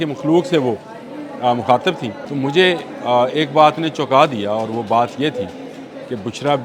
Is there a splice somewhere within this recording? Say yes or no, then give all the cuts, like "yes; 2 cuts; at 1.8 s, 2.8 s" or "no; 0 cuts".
yes; 1 cut; at 2.2 s